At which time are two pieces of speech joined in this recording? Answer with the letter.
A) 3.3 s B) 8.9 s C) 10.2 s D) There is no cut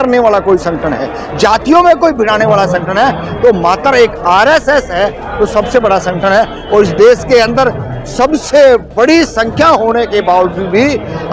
D